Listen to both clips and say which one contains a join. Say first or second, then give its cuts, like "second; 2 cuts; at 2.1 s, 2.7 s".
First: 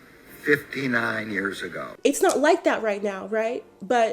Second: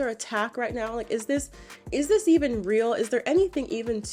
first; 1 cut; at 1.9 s